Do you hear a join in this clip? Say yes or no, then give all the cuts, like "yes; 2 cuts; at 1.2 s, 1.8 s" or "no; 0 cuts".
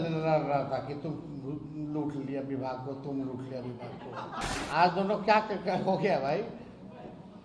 yes; 1 cut; at 4.5 s